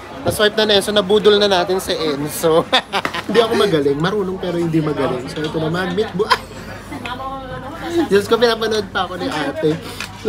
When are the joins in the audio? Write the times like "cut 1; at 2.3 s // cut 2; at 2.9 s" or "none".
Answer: cut 1; at 3.3 s